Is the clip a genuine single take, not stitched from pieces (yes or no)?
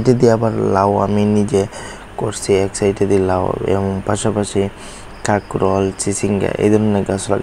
yes